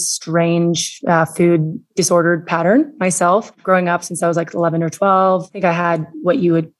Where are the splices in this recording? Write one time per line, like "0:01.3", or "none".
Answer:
none